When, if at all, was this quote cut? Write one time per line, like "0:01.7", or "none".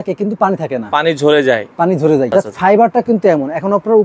0:02.3